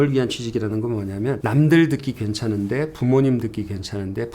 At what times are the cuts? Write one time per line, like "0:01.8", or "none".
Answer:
0:01.4

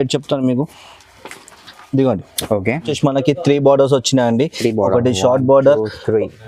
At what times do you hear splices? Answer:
0:02.9

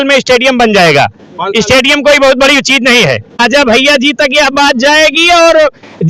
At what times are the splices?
0:03.4

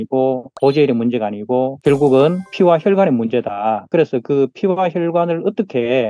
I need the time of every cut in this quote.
none

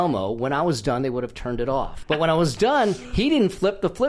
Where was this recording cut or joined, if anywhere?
0:02.0

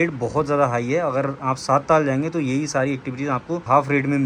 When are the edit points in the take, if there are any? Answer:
none

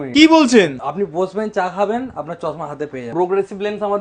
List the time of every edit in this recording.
0:03.1

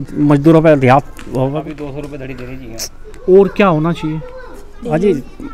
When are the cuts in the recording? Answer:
0:01.7

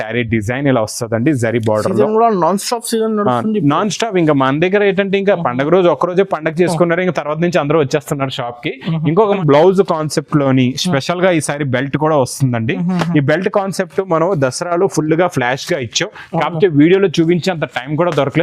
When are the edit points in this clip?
0:09.4

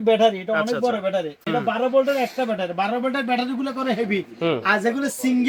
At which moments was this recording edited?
none

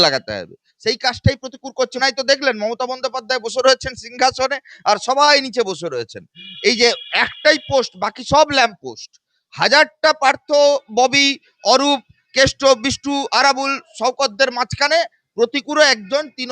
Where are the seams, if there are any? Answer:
0:02.0

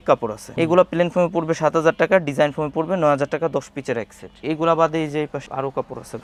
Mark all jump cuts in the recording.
none

